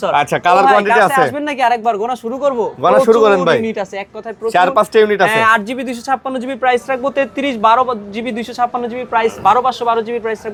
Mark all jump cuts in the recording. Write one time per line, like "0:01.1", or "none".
none